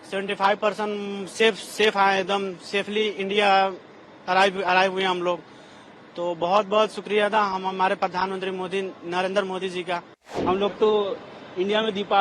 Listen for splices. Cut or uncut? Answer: cut